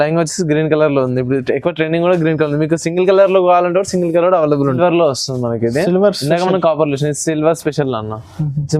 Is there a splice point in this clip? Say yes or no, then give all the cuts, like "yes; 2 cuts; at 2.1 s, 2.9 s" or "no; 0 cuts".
yes; 1 cut; at 4.8 s